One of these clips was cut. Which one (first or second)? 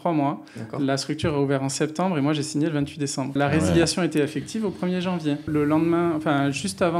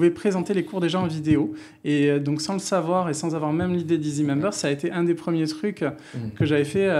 first